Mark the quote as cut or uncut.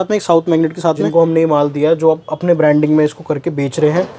cut